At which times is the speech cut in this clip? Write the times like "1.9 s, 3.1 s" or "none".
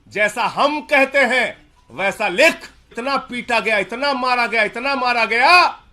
3.0 s